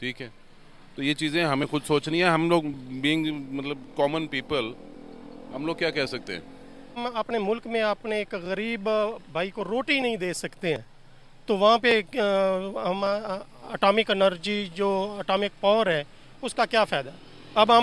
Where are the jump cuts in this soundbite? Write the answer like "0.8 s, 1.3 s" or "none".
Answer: 7.0 s